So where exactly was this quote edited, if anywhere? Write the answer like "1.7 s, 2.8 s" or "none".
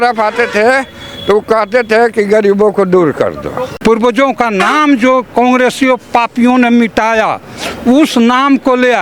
3.7 s